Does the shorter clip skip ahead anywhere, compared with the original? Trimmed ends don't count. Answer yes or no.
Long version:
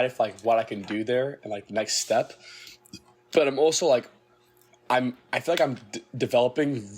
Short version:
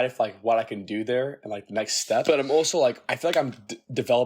yes